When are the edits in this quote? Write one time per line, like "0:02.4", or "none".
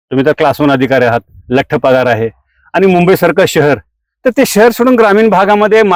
none

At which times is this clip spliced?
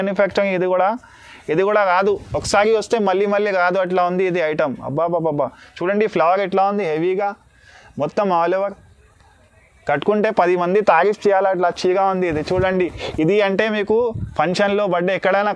none

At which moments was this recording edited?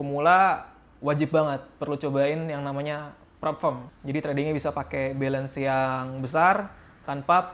none

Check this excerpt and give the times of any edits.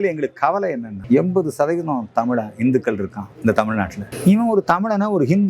0:00.9
0:03.2
0:04.1

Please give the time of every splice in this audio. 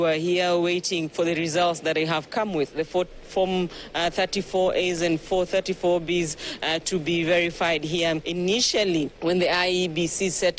none

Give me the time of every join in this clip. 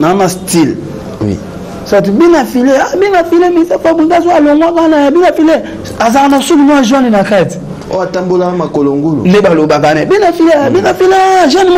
none

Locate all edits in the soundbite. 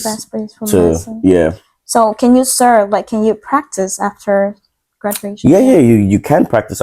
none

